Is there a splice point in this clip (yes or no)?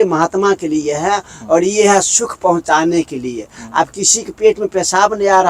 no